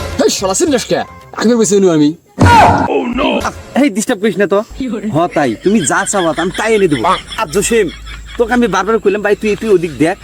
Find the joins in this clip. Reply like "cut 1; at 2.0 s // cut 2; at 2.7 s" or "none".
cut 1; at 3.4 s